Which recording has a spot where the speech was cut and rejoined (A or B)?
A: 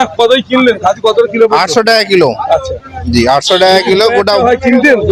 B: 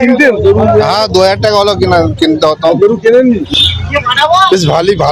B